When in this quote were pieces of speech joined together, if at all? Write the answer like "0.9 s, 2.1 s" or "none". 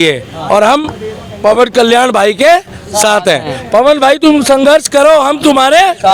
none